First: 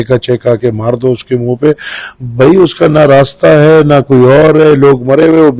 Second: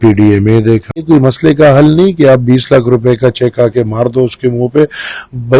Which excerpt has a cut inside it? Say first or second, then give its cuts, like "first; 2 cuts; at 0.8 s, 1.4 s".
second; 1 cut; at 1.0 s